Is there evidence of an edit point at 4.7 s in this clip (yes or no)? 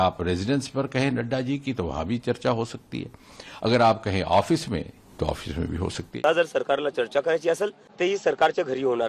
no